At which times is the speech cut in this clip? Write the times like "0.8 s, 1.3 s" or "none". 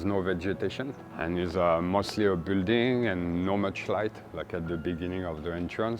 1.0 s